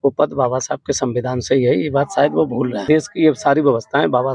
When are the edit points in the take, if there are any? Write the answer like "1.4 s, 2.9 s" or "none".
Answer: 2.8 s